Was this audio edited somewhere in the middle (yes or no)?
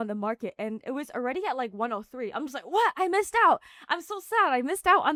no